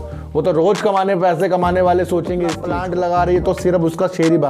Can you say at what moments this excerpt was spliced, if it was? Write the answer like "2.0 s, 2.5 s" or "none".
2.6 s